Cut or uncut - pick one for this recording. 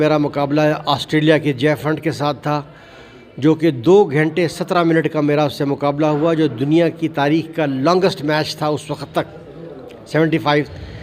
uncut